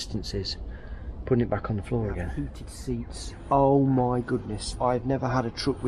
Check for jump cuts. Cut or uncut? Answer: cut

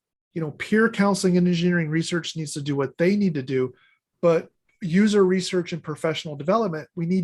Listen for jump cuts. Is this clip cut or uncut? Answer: uncut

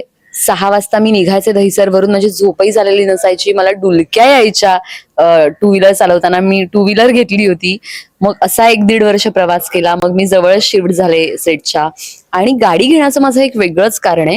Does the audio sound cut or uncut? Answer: uncut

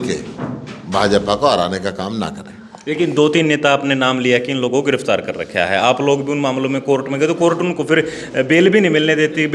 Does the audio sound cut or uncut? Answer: uncut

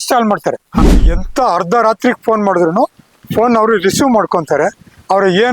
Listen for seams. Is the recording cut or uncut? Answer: cut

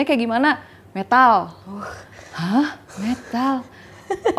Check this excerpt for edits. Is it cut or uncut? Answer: uncut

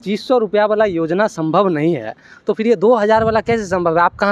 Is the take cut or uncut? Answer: uncut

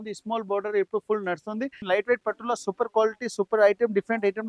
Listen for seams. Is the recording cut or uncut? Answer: cut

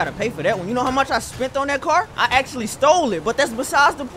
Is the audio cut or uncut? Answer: cut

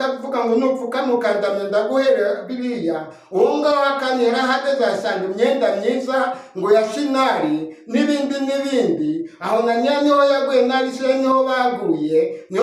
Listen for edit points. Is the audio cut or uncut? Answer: uncut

